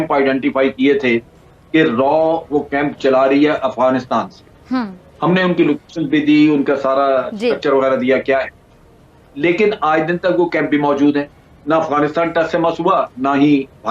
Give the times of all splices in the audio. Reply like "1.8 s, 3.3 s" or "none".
none